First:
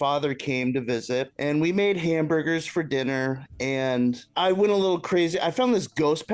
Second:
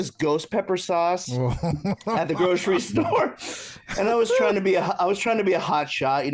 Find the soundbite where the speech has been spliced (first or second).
first